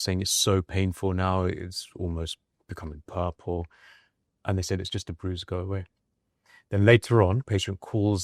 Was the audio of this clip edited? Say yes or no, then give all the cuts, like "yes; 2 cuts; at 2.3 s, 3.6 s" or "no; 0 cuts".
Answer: no; 0 cuts